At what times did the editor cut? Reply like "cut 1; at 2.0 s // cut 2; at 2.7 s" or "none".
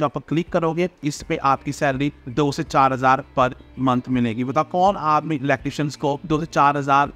cut 1; at 1.0 s // cut 2; at 2.2 s // cut 3; at 6.2 s